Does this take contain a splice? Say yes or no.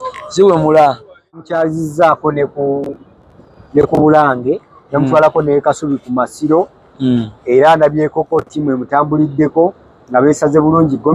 yes